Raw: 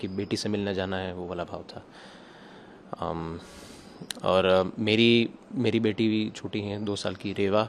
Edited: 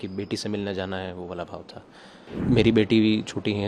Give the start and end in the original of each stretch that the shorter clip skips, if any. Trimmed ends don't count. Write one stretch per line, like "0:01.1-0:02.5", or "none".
0:02.3-0:05.4